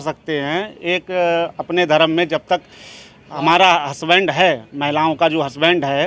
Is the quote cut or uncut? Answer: uncut